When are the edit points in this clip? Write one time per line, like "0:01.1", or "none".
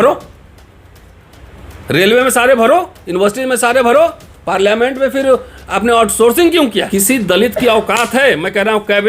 0:06.9